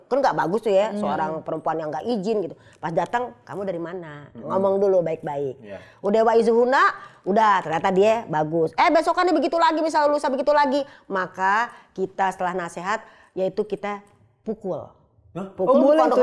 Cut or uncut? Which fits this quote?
uncut